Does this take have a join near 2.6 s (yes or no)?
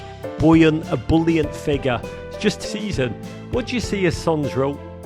yes